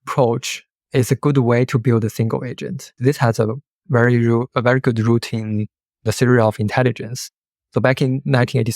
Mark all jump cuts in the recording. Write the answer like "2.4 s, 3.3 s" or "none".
3.0 s

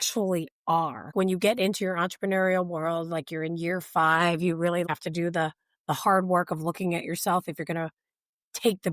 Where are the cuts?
1.1 s, 4.9 s

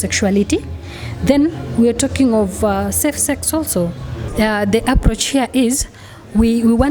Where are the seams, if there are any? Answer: 4.2 s

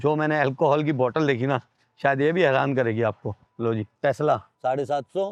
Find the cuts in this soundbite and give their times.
none

